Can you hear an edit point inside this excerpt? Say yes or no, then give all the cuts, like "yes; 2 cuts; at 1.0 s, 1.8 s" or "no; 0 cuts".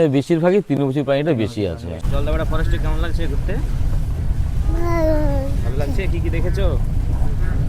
yes; 1 cut; at 2.0 s